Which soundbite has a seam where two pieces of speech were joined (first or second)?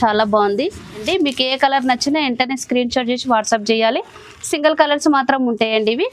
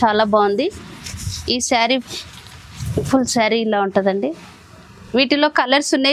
first